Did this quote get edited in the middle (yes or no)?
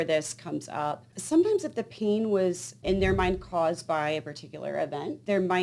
yes